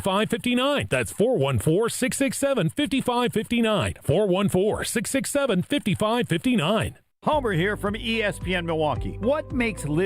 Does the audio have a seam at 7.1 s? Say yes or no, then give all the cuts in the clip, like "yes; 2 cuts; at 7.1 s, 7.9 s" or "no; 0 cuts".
yes; 1 cut; at 7.1 s